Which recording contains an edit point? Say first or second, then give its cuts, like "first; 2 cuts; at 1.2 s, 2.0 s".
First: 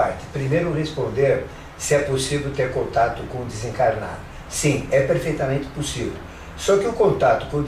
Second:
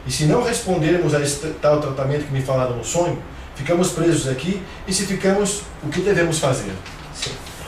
second; 1 cut; at 3.4 s